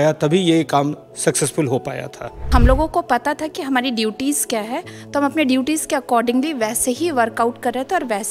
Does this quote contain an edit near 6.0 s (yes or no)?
no